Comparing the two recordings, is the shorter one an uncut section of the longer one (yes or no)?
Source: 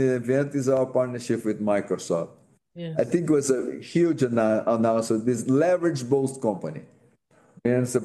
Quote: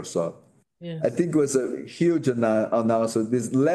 yes